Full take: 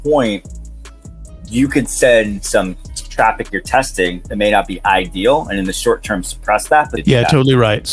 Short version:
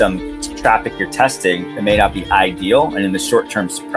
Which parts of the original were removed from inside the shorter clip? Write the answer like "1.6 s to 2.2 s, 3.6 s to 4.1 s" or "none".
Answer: none

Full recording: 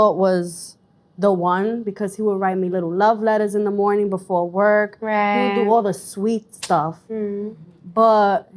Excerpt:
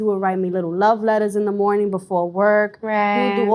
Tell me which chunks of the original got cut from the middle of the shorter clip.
none

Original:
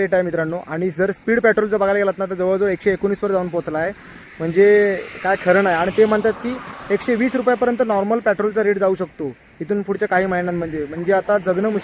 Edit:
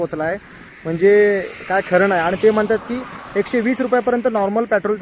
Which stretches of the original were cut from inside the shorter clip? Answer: none

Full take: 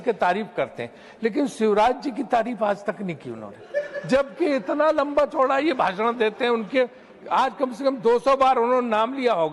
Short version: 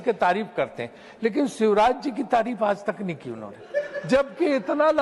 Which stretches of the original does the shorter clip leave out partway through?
none

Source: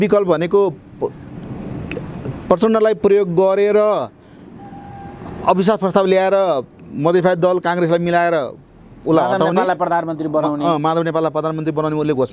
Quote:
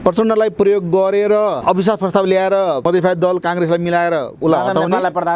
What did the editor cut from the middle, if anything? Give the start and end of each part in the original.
4.0 s to 5.4 s, 6.6 s to 7.0 s, 8.5 s to 9.0 s

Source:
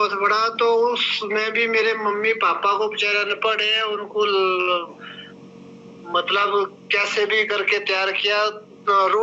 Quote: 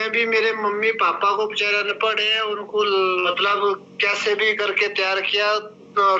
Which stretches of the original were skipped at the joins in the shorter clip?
4.7 s to 6.2 s

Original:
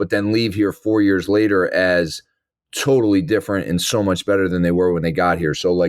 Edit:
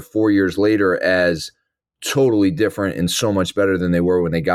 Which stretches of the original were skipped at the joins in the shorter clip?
none

